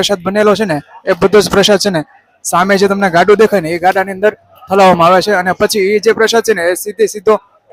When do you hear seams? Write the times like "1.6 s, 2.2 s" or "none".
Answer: none